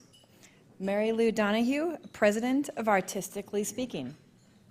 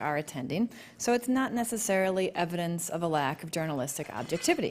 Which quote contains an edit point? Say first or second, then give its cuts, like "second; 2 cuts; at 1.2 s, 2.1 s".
first; 1 cut; at 3.3 s